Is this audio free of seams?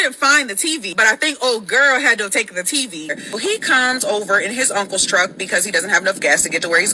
no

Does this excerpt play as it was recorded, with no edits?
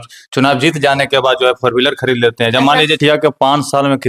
no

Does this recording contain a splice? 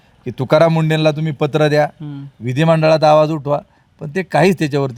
no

